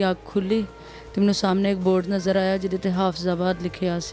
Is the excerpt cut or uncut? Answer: uncut